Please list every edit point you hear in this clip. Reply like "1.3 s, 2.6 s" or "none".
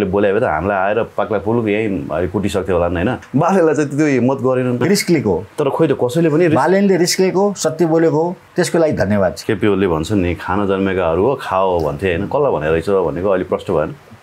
3.2 s, 4.8 s, 8.5 s, 9.4 s